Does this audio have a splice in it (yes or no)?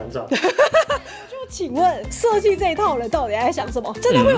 yes